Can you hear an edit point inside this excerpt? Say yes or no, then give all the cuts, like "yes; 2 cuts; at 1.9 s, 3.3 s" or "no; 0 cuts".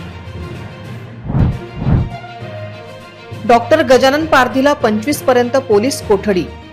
yes; 1 cut; at 1.0 s